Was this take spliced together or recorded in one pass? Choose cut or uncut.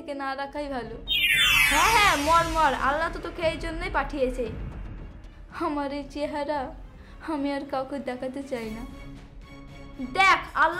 uncut